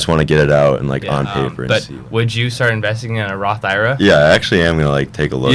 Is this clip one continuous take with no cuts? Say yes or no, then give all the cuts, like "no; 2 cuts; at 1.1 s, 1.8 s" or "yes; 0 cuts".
no; 1 cut; at 1.6 s